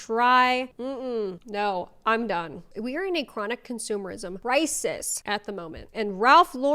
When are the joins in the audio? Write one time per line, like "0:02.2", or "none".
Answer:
0:02.6
0:04.3
0:05.1